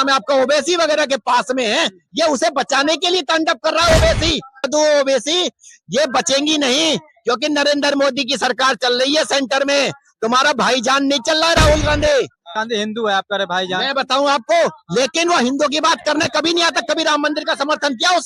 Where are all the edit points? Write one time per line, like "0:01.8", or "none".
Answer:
0:04.7
0:12.6